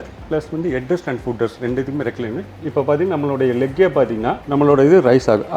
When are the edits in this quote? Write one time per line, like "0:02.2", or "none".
0:02.6